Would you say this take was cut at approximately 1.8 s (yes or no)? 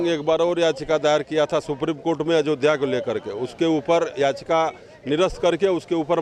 no